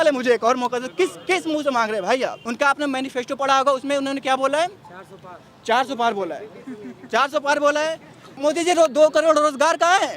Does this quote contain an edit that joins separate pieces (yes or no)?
yes